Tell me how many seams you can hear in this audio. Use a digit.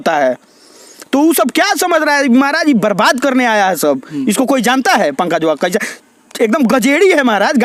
0